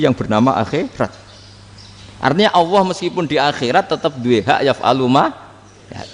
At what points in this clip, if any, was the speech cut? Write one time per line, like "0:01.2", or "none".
none